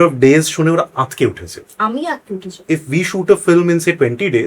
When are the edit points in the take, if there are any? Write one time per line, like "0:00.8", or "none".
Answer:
0:02.6